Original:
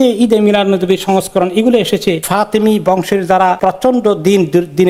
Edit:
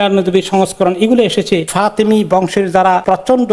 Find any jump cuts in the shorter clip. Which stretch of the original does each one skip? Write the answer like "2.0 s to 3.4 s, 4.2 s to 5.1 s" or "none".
none